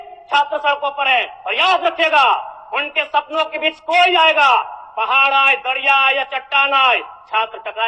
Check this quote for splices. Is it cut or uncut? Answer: uncut